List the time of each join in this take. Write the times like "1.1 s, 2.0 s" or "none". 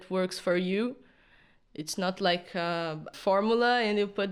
3.1 s